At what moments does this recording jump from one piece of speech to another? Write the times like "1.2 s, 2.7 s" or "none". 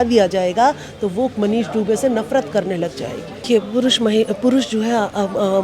3.4 s